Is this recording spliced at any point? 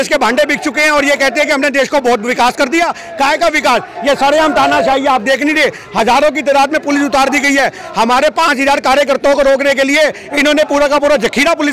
no; 0 cuts

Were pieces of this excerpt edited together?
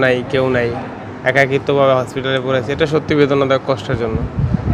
no; 0 cuts

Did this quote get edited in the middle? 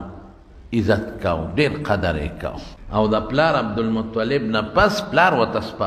yes; 1 cut; at 2.7 s

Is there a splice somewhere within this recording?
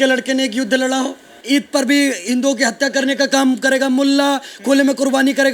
yes; 1 cut; at 1.3 s

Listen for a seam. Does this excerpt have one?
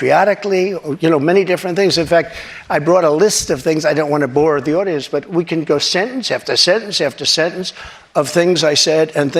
no; 0 cuts

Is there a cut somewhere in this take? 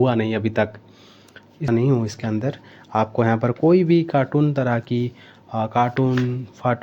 yes; 1 cut; at 1.7 s

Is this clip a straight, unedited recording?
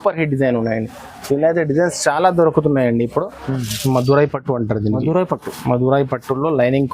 no; 1 cut; at 3.4 s

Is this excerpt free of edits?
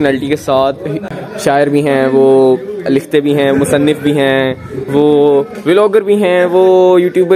no; 1 cut; at 1.1 s

